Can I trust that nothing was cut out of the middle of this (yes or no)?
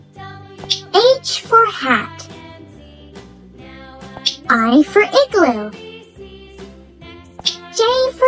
yes